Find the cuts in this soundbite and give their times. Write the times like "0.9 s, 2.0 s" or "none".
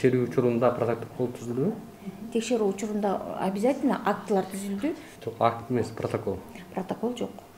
5.1 s